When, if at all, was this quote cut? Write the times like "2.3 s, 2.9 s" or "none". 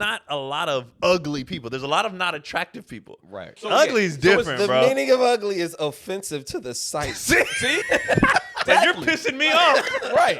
0.9 s, 3.5 s, 7.8 s, 8.6 s